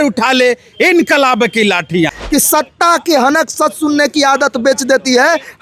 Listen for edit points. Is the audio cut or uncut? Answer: cut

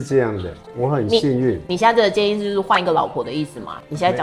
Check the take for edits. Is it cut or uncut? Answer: uncut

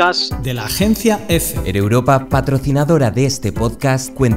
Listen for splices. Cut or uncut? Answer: cut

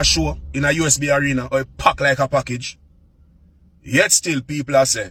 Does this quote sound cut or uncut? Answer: uncut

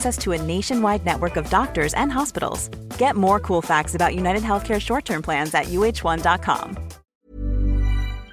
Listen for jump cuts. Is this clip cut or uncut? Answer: cut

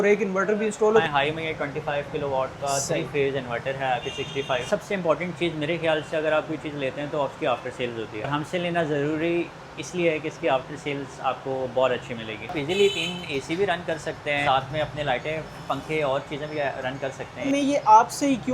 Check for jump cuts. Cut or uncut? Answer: cut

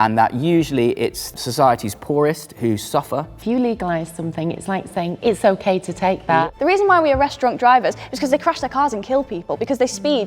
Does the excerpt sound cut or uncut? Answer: cut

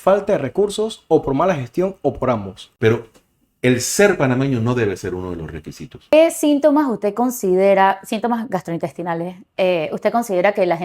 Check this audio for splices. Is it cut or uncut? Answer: cut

